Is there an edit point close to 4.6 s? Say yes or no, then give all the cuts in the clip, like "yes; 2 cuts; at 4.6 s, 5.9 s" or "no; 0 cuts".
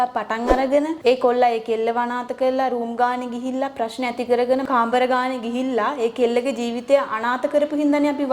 yes; 2 cuts; at 0.9 s, 4.6 s